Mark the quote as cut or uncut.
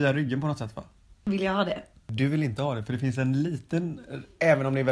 cut